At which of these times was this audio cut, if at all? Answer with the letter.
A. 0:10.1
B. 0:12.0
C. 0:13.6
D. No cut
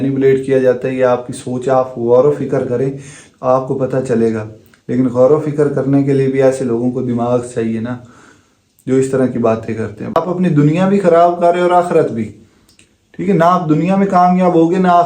A